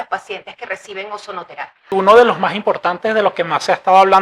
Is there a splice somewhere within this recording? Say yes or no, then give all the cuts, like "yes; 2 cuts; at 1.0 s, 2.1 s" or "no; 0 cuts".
yes; 1 cut; at 1.9 s